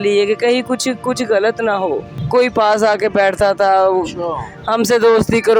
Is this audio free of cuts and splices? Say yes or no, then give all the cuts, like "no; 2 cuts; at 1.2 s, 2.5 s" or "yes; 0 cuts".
no; 1 cut; at 2.1 s